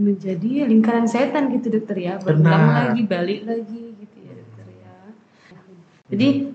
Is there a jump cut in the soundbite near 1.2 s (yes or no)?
no